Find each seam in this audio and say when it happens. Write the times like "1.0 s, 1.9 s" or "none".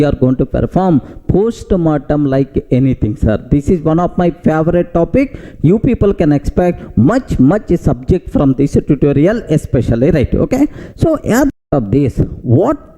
11.6 s